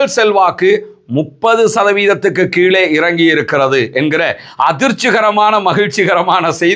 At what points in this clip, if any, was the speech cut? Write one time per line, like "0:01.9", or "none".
none

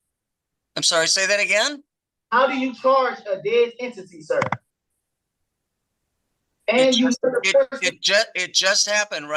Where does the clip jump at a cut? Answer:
none

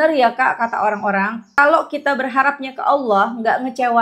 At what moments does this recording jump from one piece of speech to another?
0:01.5

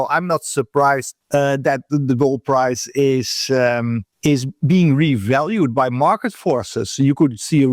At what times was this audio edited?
0:01.1
0:04.1

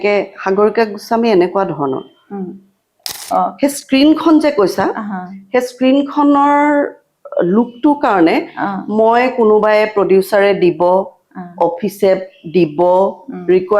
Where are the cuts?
0:03.1

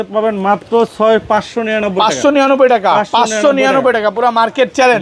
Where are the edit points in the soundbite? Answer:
none

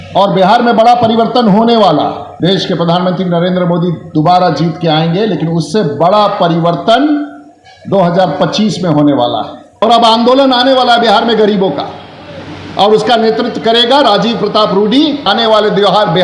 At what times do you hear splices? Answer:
0:02.2
0:09.8
0:15.3

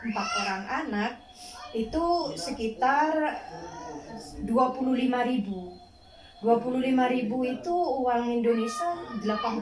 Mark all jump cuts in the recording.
none

